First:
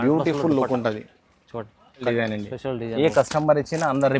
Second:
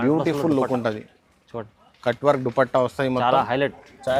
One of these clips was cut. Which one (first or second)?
first